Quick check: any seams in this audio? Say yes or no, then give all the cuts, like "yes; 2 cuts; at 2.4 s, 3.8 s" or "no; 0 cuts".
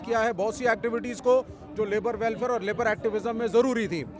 no; 0 cuts